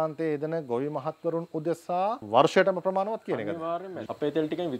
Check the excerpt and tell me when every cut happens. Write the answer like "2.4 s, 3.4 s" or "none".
2.2 s, 3.9 s